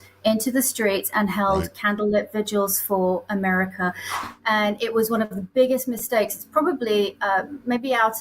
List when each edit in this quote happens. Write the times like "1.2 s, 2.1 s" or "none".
4.1 s